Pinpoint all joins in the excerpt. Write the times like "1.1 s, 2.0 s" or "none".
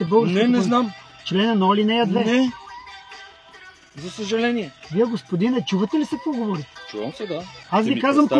1.0 s, 2.6 s, 4.8 s, 7.6 s